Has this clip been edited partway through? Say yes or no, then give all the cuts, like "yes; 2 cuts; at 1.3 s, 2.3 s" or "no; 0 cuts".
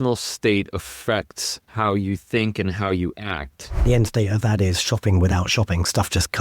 yes; 1 cut; at 3.8 s